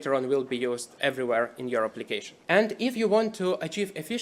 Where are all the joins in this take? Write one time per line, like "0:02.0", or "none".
0:02.3